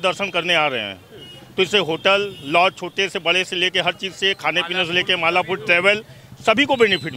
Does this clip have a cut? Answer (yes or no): no